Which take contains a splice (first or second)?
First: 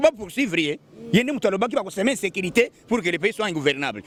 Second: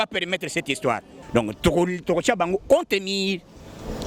second